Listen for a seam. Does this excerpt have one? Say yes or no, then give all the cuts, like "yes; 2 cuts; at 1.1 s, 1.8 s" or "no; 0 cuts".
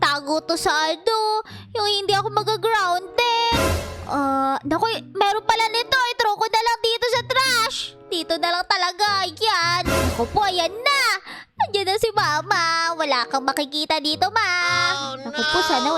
yes; 2 cuts; at 9.9 s, 15.0 s